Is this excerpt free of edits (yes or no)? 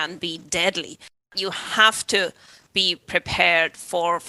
no